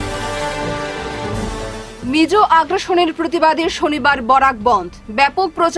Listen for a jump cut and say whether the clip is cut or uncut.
uncut